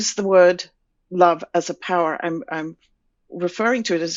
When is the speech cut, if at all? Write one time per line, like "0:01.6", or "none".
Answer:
none